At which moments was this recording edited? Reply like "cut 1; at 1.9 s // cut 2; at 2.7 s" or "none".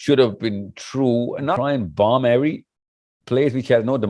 cut 1; at 1.5 s